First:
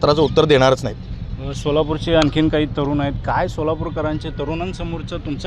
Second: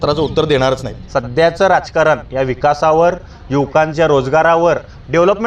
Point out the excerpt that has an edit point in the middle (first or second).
second